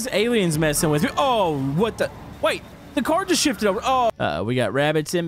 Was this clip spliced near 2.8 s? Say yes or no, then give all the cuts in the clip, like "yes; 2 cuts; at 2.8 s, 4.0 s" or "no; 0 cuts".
no; 1 cut; at 4.1 s